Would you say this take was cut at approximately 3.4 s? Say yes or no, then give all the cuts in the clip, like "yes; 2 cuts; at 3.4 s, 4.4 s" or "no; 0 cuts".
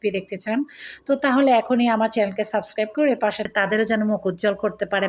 yes; 1 cut; at 3.4 s